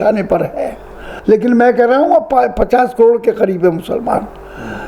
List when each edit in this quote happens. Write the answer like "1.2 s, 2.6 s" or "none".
1.1 s